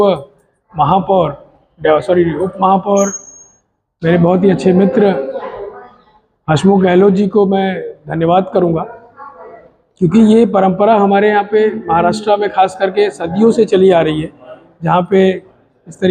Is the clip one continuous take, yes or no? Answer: yes